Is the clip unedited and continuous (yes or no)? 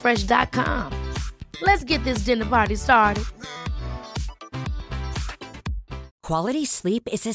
no